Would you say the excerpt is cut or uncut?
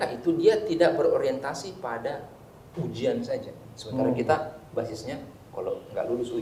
uncut